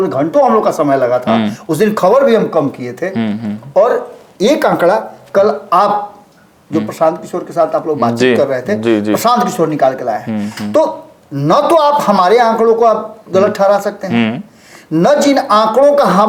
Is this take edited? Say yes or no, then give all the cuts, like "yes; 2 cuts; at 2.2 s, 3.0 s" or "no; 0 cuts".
no; 0 cuts